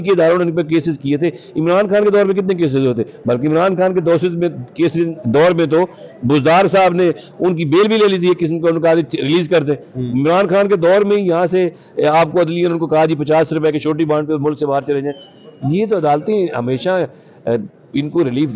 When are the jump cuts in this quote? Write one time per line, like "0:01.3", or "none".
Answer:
none